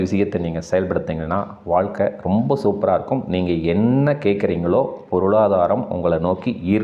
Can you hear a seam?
no; 0 cuts

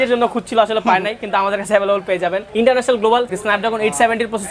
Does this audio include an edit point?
yes; 2 cuts; at 2.4 s, 3.3 s

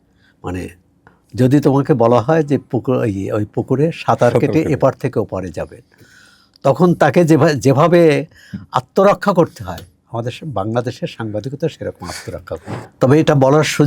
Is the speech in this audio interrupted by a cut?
yes; 1 cut; at 12.8 s

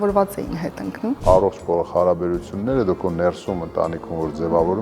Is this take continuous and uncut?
no; 1 cut; at 1.2 s

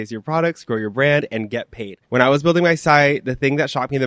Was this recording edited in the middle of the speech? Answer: yes; 1 cut; at 2.0 s

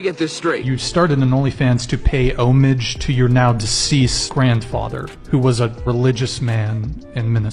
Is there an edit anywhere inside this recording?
no; 0 cuts

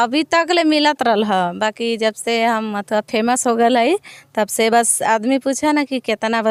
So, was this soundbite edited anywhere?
no; 0 cuts

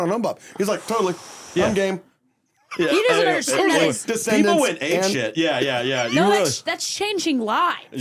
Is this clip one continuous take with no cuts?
yes; 0 cuts

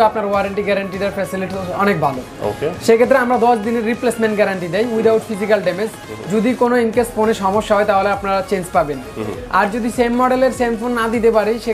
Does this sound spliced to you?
no; 0 cuts

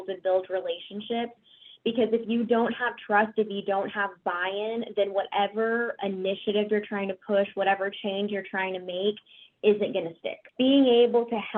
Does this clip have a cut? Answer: yes; 1 cut; at 10.4 s

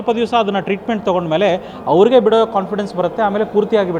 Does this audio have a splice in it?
no; 0 cuts

